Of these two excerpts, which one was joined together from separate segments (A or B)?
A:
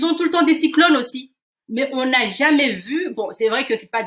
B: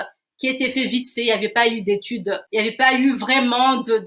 B